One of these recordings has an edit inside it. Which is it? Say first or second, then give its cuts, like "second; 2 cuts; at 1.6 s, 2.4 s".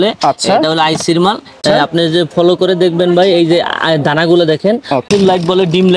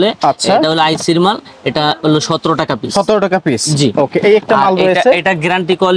first; 2 cuts; at 1.6 s, 5.0 s